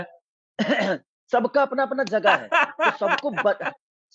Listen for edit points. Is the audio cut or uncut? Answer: uncut